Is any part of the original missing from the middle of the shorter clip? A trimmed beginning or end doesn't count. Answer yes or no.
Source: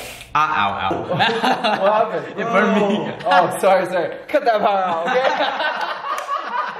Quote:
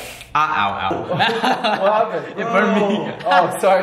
no